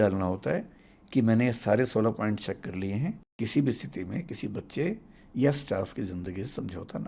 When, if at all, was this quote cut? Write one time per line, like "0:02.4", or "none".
0:03.3